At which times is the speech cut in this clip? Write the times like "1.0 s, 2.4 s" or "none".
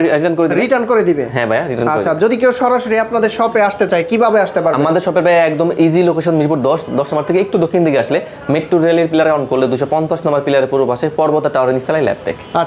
none